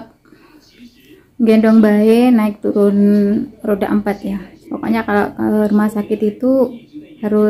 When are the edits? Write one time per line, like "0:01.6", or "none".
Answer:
0:04.5